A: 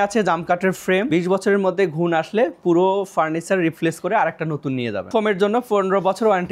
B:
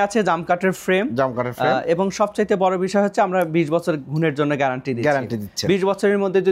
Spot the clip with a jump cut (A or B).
A